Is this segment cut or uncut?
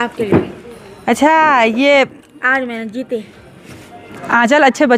uncut